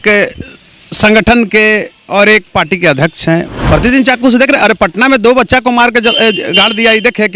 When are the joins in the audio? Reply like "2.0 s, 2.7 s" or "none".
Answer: 3.5 s